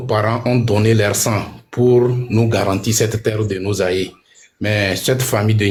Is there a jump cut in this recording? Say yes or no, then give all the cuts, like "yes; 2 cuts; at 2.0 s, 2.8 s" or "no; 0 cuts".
no; 0 cuts